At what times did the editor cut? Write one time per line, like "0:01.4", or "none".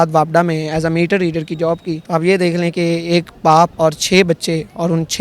0:01.9
0:03.7